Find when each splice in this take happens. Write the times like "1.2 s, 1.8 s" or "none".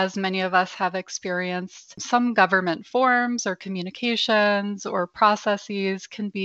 2.0 s